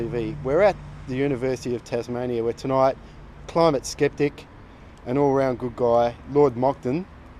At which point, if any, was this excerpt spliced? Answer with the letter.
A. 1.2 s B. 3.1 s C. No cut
C